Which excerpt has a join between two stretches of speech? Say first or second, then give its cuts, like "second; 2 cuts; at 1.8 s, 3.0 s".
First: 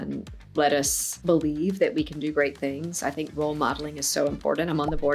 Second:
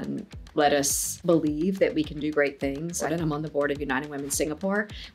second; 1 cut; at 3.1 s